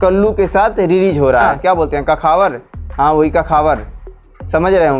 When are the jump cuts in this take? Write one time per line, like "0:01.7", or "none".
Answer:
0:01.5